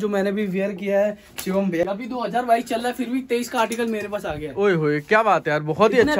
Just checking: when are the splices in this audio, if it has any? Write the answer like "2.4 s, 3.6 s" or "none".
1.8 s